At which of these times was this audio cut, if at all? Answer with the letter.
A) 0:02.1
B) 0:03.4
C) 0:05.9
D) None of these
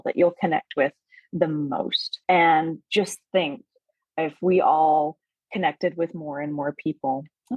A